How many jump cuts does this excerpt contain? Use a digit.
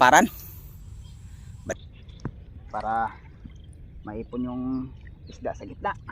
1